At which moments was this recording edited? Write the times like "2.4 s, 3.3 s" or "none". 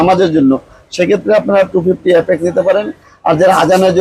none